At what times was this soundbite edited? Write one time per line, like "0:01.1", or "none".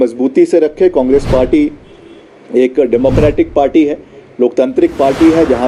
none